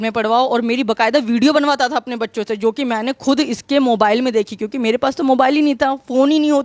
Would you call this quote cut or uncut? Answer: uncut